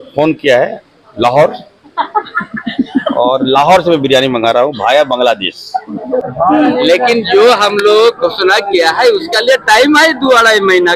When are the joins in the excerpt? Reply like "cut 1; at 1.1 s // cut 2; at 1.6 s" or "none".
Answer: cut 1; at 6.3 s